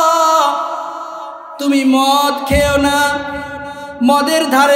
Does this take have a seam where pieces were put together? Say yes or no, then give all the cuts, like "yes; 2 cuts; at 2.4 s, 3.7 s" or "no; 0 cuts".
no; 0 cuts